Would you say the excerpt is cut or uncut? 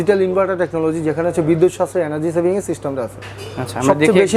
uncut